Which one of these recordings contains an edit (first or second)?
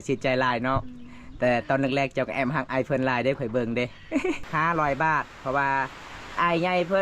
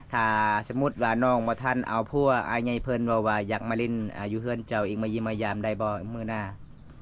first